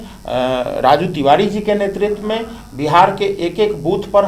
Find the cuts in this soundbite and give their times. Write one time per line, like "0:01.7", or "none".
none